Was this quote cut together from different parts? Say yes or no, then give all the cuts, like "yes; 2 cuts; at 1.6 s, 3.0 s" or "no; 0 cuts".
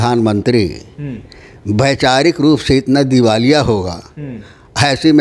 no; 0 cuts